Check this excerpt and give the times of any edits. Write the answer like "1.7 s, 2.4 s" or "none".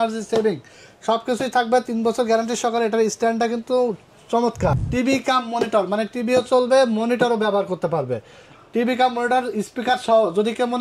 4.8 s